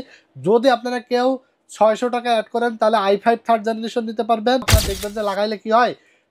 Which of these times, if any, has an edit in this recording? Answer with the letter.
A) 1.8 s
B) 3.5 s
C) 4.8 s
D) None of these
C